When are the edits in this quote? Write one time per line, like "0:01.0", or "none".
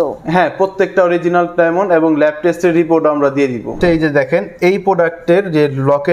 0:03.8

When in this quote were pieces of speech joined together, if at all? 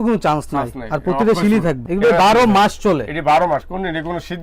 0:01.8

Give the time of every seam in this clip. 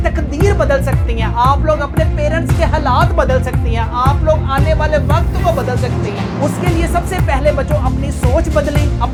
none

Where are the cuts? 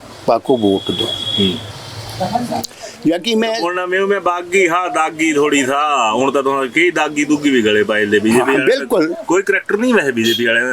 none

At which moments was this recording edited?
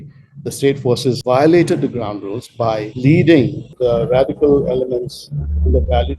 0:01.2
0:02.9
0:03.7

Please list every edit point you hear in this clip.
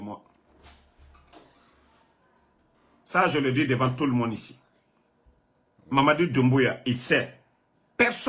none

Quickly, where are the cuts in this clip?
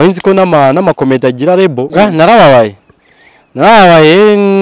0:01.9

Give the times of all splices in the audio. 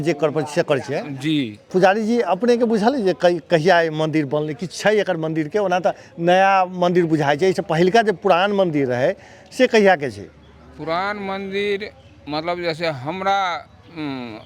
0:01.7

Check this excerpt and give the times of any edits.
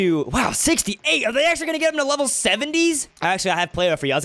0:03.1

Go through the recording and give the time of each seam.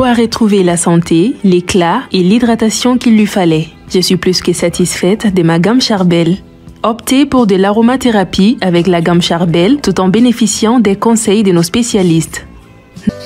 none

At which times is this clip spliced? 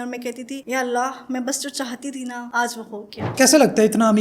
0:03.2

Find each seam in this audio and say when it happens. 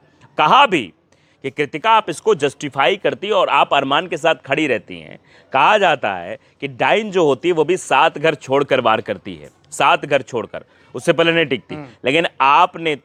none

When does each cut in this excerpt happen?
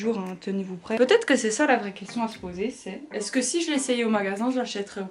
0:01.0

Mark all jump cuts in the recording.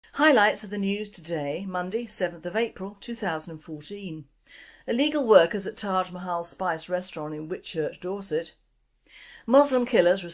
0:03.0

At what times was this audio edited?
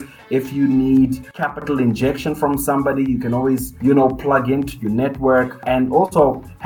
0:01.5
0:03.7
0:05.6

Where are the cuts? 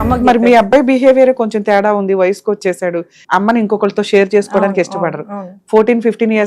0:03.1

